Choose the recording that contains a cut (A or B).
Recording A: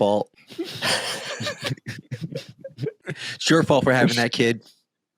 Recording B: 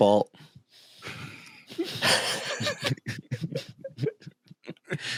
A